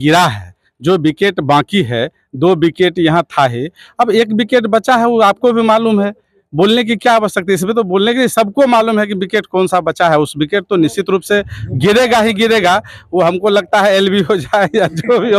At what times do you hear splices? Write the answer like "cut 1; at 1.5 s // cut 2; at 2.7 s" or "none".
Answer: none

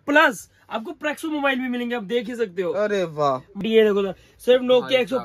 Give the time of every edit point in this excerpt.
cut 1; at 3.6 s

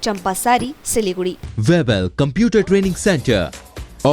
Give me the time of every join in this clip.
cut 1; at 1.4 s

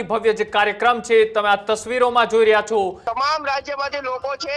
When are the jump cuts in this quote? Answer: cut 1; at 3.0 s

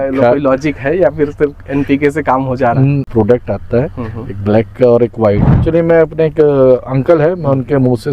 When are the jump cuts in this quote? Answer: cut 1; at 3.1 s // cut 2; at 5.5 s

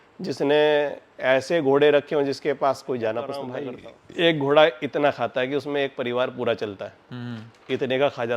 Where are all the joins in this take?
cut 1; at 3.6 s

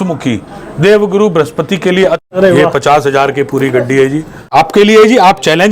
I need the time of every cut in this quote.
cut 1; at 2.2 s // cut 2; at 4.4 s

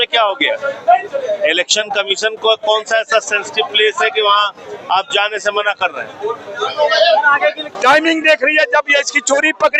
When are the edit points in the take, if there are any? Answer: cut 1; at 7.6 s

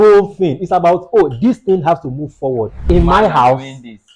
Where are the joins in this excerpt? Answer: cut 1; at 2.8 s

